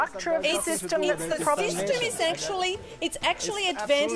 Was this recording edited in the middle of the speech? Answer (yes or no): no